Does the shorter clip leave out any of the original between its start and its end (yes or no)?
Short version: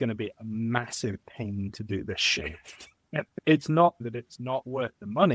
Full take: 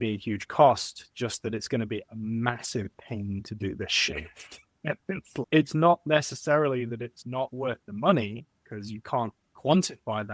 yes